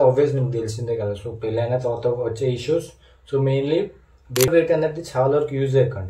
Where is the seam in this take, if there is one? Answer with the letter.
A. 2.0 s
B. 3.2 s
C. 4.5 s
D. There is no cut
C